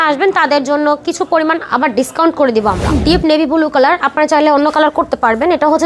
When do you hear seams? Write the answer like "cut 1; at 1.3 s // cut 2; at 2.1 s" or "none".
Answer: cut 1; at 3.0 s